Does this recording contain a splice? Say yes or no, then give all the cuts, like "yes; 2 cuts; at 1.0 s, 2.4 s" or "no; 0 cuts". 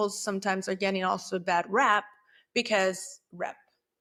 no; 0 cuts